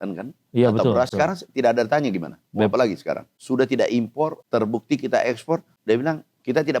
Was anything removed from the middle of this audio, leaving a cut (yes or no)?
yes